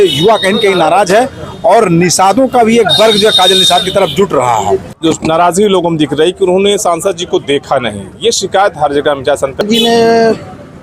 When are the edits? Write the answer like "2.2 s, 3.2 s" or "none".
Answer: 4.9 s, 9.6 s